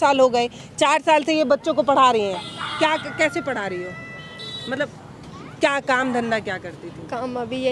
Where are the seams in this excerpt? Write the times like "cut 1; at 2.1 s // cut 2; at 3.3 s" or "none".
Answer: none

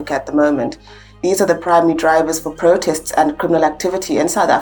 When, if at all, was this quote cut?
cut 1; at 1.2 s

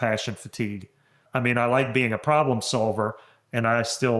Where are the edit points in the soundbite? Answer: cut 1; at 1.2 s

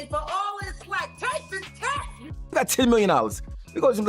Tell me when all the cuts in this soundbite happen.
cut 1; at 2.5 s

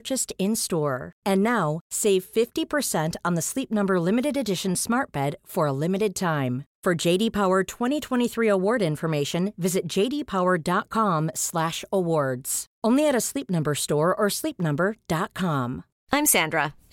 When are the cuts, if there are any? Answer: cut 1; at 15.9 s

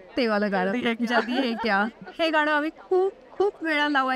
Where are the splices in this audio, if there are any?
none

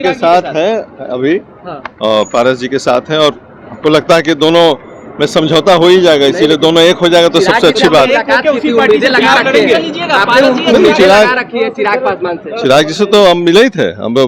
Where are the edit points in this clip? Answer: none

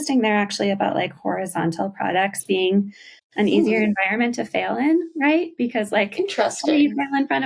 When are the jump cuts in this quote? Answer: none

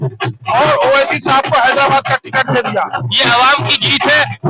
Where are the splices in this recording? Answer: cut 1; at 2.9 s

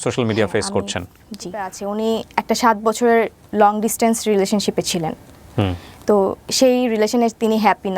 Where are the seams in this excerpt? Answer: cut 1; at 1.8 s

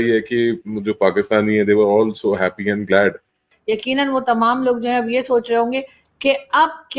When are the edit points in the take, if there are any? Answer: cut 1; at 3.5 s

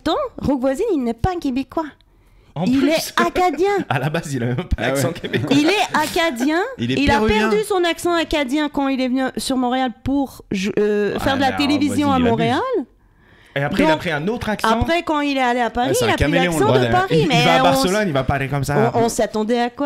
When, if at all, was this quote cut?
none

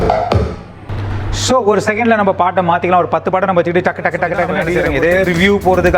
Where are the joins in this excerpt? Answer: cut 1; at 4.8 s

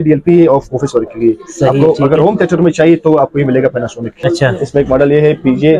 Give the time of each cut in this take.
cut 1; at 4.2 s

